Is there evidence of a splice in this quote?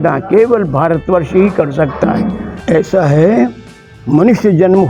yes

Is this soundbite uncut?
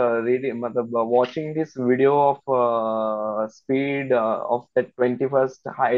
yes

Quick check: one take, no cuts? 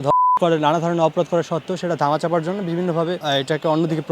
no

